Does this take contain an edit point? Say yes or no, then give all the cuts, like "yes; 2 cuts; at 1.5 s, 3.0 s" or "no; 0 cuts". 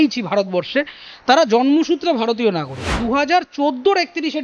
yes; 1 cut; at 3.0 s